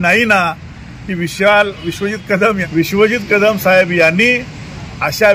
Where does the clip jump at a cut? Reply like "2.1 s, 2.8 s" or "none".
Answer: 2.6 s

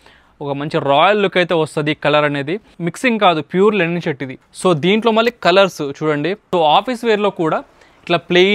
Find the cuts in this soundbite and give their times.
2.7 s, 4.4 s, 6.4 s

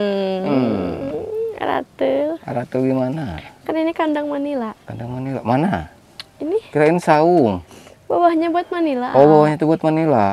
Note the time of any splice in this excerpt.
none

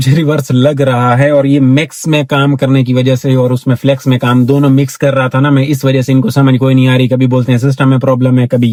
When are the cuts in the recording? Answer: none

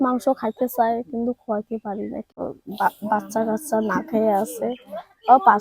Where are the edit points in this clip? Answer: 2.3 s

